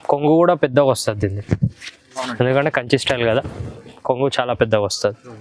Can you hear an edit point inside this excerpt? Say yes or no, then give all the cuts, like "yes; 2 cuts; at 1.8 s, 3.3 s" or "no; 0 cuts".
no; 0 cuts